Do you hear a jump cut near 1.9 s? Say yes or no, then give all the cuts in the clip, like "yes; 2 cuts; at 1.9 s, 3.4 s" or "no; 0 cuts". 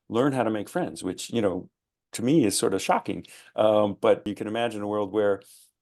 no; 1 cut; at 4.2 s